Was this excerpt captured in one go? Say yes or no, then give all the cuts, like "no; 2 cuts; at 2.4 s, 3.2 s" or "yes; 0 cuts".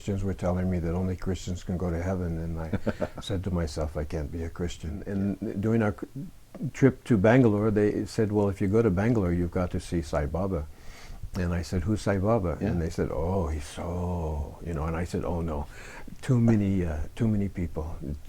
no; 1 cut; at 5.1 s